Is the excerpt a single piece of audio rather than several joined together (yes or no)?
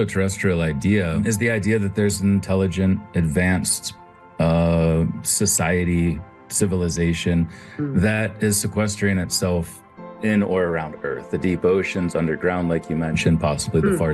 yes